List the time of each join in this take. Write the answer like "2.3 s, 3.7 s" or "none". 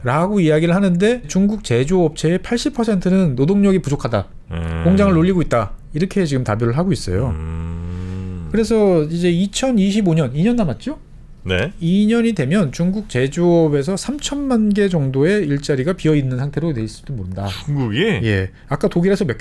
none

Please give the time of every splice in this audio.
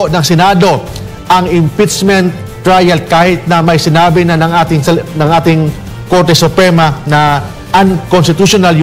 none

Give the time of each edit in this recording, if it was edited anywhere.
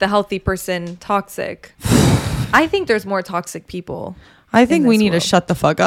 1.7 s

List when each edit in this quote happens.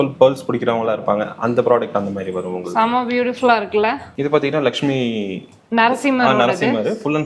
none

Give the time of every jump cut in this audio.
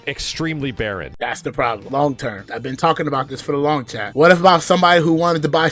1.4 s, 2.5 s, 4.1 s

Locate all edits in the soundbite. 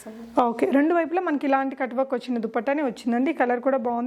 none

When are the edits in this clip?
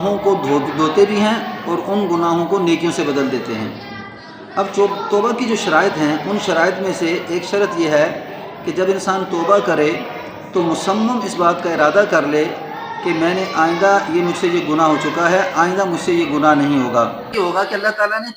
17.3 s

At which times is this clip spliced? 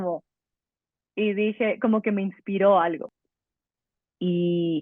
3.1 s

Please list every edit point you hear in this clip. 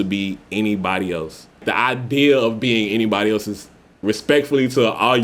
1.6 s

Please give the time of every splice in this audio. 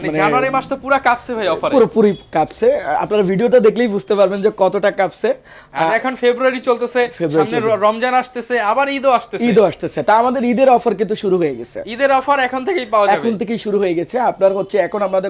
none

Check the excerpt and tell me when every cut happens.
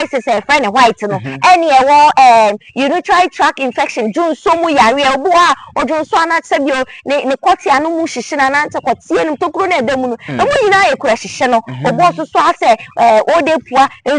none

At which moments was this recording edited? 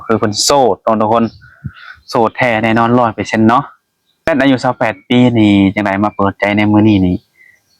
4.3 s

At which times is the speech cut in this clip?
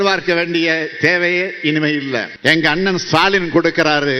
2.3 s

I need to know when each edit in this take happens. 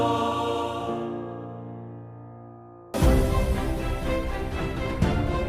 2.9 s

